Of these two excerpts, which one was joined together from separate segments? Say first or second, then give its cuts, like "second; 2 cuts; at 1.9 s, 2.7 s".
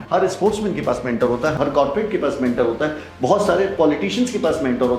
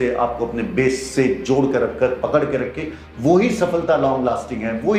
first; 1 cut; at 1.5 s